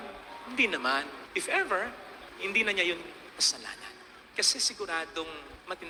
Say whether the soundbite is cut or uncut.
uncut